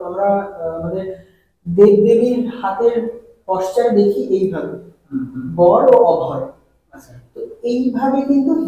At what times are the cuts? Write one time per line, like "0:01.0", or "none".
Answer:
none

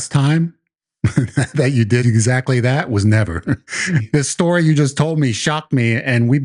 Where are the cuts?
0:02.0
0:04.0

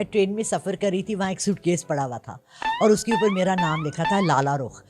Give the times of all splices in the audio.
none

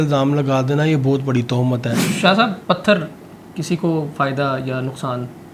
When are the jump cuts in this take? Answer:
0:02.0

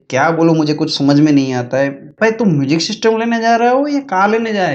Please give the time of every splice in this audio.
0:02.1

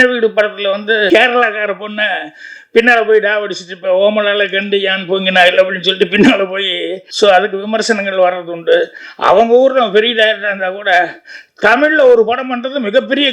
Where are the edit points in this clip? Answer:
0:01.1
0:07.0
0:09.0

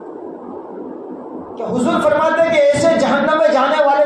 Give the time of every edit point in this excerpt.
0:01.7

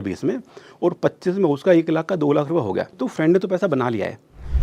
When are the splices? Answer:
0:03.0

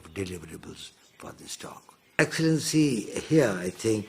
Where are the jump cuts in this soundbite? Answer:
0:02.2

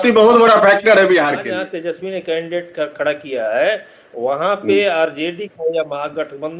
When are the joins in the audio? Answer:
0:01.4

